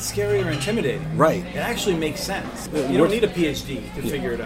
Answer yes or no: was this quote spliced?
yes